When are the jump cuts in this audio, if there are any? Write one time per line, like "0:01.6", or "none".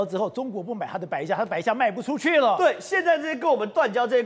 none